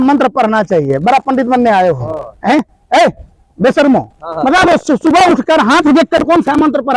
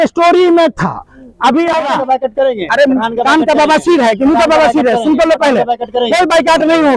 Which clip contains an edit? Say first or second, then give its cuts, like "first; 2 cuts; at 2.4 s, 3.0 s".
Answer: second; 1 cut; at 1.9 s